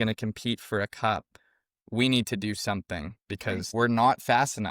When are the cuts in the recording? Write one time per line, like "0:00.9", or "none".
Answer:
0:03.7